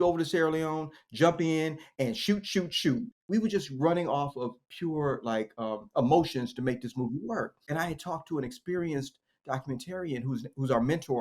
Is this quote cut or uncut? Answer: cut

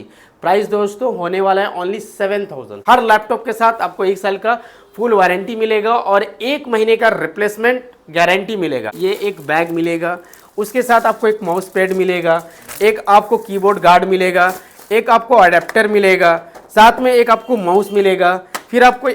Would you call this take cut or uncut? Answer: cut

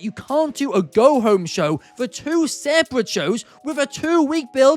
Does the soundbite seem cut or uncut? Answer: uncut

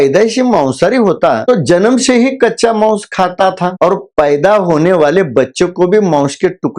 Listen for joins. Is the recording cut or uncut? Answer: uncut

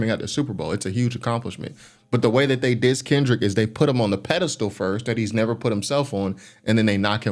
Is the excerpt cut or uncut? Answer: uncut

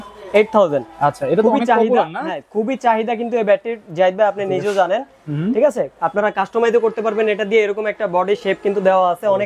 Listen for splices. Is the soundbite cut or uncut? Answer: uncut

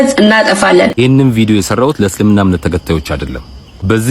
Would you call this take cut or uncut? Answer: cut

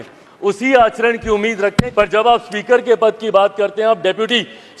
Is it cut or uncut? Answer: cut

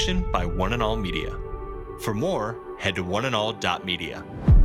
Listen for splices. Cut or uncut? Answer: uncut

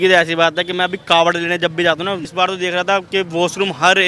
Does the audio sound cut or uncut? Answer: cut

